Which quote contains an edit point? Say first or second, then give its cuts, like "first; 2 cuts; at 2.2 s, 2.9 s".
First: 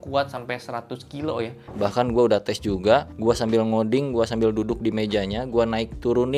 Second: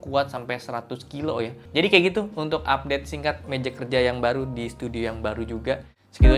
first; 1 cut; at 1.7 s